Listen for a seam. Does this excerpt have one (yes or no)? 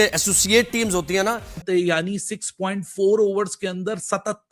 yes